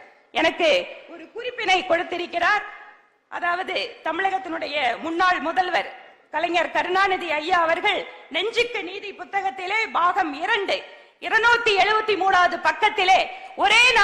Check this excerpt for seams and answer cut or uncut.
uncut